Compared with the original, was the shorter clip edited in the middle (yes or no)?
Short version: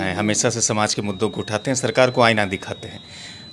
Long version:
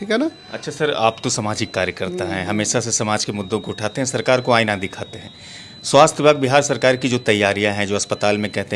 no